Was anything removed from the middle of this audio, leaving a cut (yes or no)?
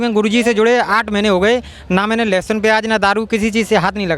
no